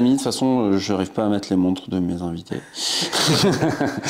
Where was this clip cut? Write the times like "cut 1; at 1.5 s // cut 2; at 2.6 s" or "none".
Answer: none

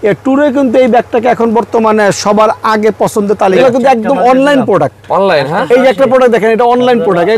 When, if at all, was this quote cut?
cut 1; at 3.6 s

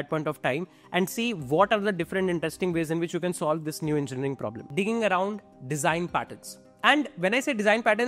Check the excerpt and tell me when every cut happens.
cut 1; at 4.6 s // cut 2; at 5.5 s

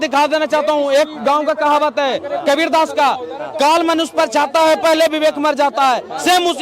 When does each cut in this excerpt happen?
none

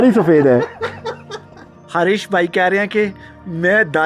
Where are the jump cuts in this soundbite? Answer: cut 1; at 1.8 s

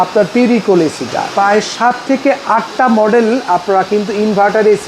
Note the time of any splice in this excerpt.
cut 1; at 1.2 s

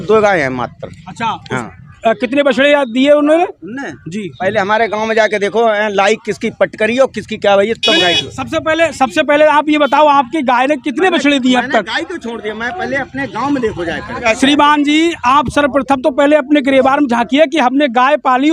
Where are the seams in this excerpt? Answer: cut 1; at 14.2 s

